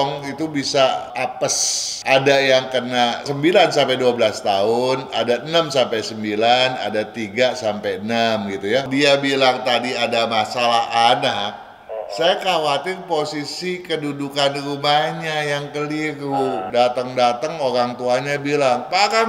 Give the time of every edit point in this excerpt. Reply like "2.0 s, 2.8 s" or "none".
1.4 s, 8.9 s, 16.6 s